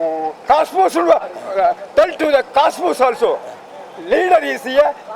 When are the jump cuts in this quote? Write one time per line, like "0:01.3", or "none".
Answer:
none